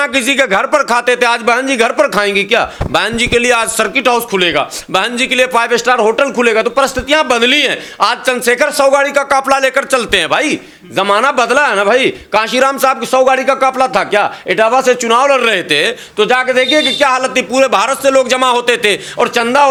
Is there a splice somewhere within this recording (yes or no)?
no